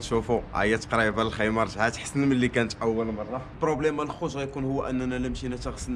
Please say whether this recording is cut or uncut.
cut